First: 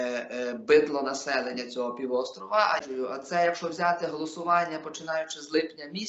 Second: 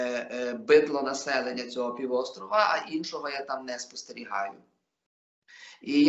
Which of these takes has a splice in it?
first; 1 cut; at 2.9 s

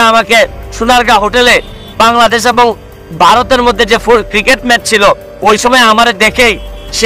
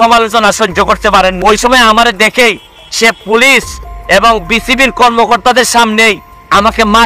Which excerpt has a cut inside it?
second; 1 cut; at 1.4 s

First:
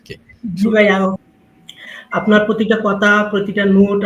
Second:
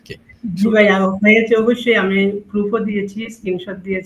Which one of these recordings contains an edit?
first; 1 cut; at 1.2 s

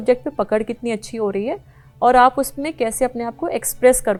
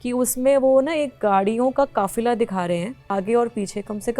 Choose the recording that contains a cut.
second; 1 cut; at 3.1 s

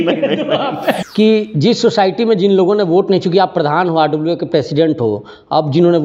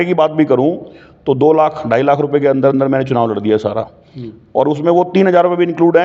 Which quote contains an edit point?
first; 1 cut; at 1.0 s

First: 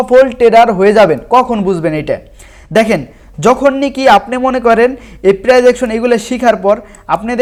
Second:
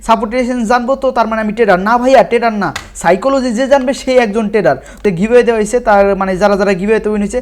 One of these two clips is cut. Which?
second; 1 cut; at 5.0 s

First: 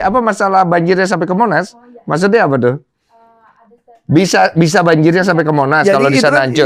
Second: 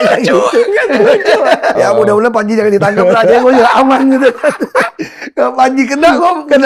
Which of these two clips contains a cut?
second; 1 cut; at 1.7 s

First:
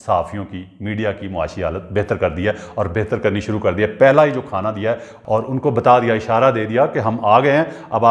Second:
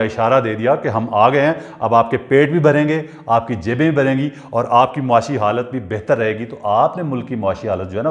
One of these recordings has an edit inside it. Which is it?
first; 1 cut; at 5.1 s

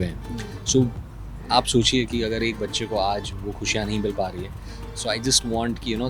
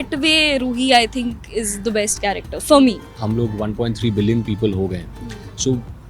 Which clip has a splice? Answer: second; 1 cut; at 3.1 s

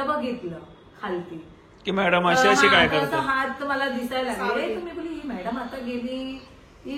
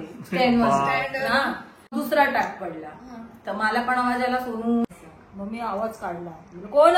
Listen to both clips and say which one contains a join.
second; 2 cuts; at 1.9 s, 4.8 s

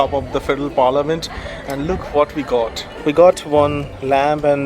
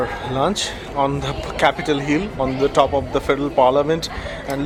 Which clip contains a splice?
first; 1 cut; at 2.9 s

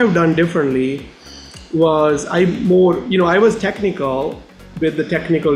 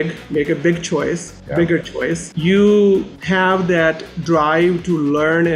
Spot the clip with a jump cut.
second; 3 cuts; at 1.3 s, 2.3 s, 3.2 s

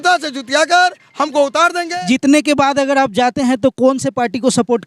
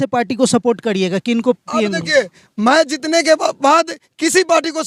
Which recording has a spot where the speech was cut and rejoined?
first; 1 cut; at 1.8 s

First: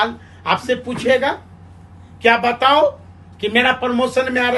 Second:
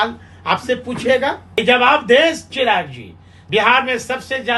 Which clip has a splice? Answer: second; 2 cuts; at 1.6 s, 3.3 s

